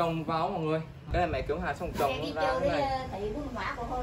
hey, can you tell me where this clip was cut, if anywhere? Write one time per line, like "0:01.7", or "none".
0:01.1